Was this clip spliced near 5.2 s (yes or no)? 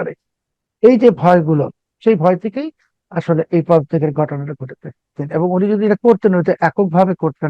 yes